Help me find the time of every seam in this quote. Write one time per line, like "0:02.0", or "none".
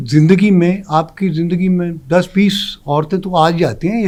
none